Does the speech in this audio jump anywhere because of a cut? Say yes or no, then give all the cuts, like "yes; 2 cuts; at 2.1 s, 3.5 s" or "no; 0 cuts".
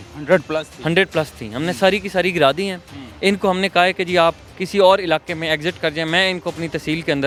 no; 0 cuts